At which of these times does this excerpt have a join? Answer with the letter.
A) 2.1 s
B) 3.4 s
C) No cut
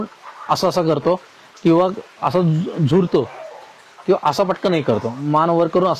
C